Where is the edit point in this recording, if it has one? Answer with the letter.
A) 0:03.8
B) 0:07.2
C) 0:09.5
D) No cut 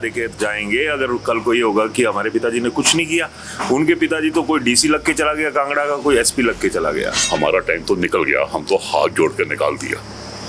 B